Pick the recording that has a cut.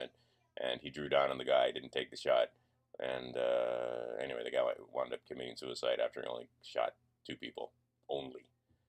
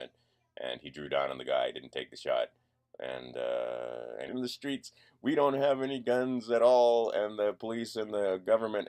first; 1 cut; at 4.3 s

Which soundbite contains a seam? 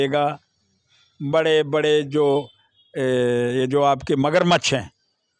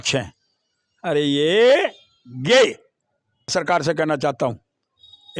second; 1 cut; at 3.5 s

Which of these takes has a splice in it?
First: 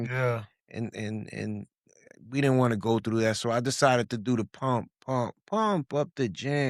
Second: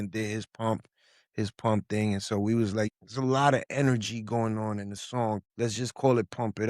second; 2 cuts; at 2.9 s, 5.5 s

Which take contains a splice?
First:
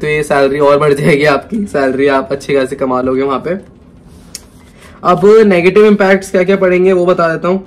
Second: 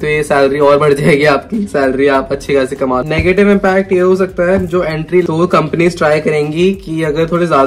second; 2 cuts; at 3.0 s, 5.2 s

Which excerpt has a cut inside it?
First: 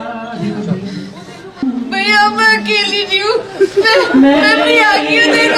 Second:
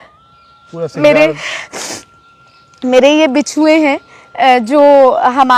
first; 1 cut; at 1.6 s

